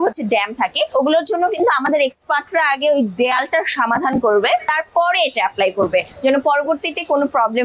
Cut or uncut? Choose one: uncut